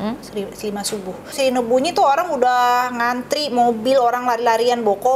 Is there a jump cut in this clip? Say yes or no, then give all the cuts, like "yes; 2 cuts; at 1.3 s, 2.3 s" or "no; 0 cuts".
yes; 1 cut; at 1.3 s